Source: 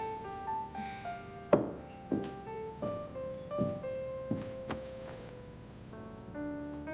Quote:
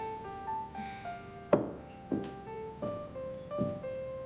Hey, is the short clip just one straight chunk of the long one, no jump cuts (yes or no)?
yes